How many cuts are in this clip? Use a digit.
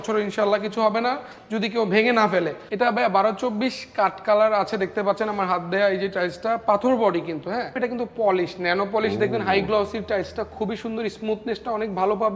2